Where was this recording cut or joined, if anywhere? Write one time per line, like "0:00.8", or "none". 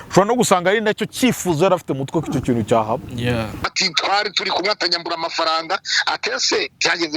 0:03.8